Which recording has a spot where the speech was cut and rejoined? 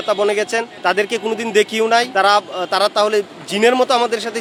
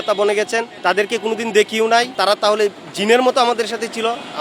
second; 1 cut; at 2.1 s

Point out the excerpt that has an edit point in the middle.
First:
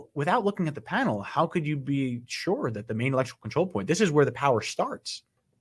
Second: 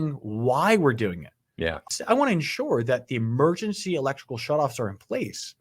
second; 1 cut; at 1.8 s

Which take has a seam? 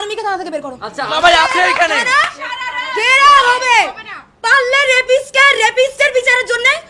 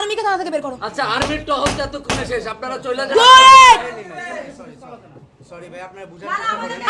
first; 1 cut; at 1.2 s

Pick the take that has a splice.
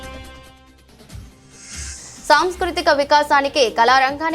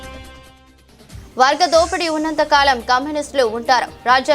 second; 1 cut; at 1.1 s

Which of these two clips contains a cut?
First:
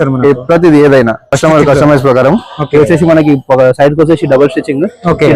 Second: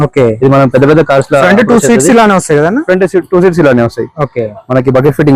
first; 1 cut; at 1.4 s

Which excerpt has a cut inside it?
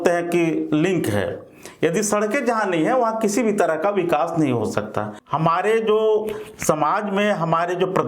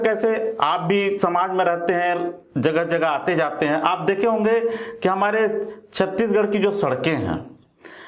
first; 1 cut; at 5.2 s

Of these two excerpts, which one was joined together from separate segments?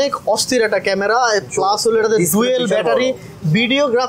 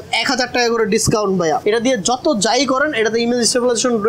second; 1 cut; at 1.6 s

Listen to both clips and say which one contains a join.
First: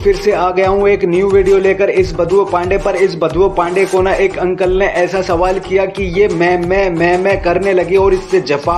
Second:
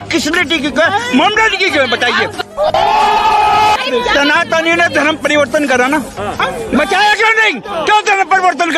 second; 4 cuts; at 2.4 s, 3.8 s, 6.4 s, 7.8 s

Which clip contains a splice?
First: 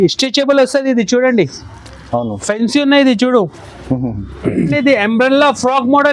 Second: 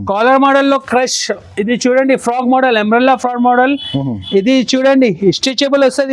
first; 1 cut; at 4.7 s

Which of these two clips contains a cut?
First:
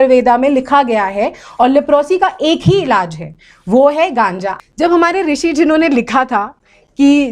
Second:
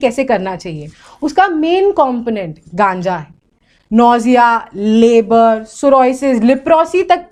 first; 1 cut; at 4.5 s

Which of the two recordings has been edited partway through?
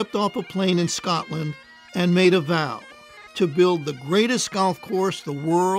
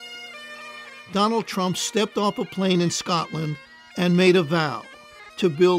second; 1 cut; at 1.0 s

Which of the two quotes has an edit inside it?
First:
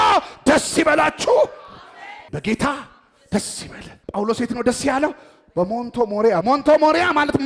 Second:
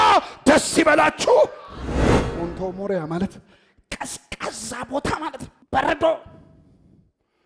second; 1 cut; at 2.1 s

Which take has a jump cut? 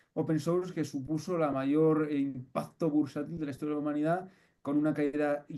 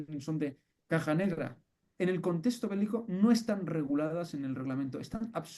second; 1 cut; at 1.8 s

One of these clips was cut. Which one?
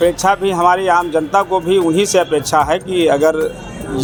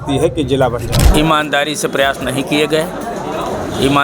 second; 1 cut; at 1.1 s

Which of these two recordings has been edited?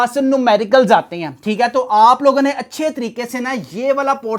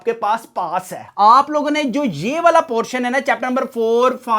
second; 1 cut; at 1.1 s

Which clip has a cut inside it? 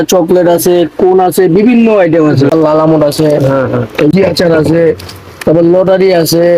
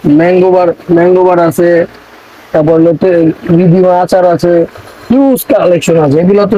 first; 2 cuts; at 2.5 s, 4.1 s

